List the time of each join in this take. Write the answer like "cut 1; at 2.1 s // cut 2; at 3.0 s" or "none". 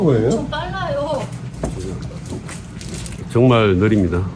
none